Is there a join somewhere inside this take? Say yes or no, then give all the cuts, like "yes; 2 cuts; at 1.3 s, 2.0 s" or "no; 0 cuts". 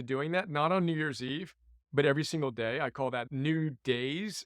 yes; 1 cut; at 3.3 s